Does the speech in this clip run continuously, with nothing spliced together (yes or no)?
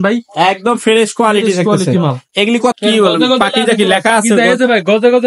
no